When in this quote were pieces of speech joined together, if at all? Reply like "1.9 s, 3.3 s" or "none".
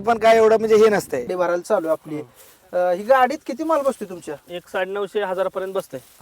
1.3 s